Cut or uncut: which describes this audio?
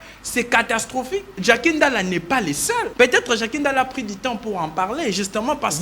cut